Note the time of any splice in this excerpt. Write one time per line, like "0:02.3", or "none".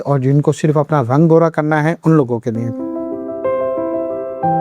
0:02.7